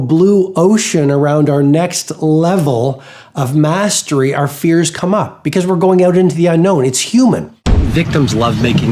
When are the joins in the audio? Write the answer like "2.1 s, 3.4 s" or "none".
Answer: 7.9 s